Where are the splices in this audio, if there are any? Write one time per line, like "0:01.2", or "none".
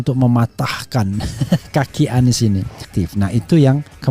0:02.9